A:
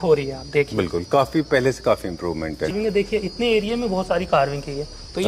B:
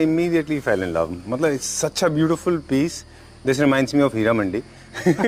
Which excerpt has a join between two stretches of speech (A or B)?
A